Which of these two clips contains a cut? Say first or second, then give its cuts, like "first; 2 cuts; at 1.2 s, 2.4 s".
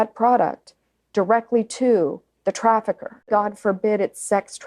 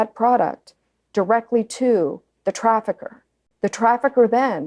first; 1 cut; at 3.3 s